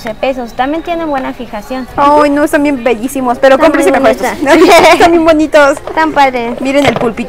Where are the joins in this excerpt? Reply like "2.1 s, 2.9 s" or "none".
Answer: 1.8 s